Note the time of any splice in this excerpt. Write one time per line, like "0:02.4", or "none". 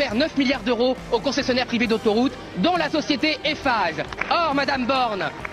none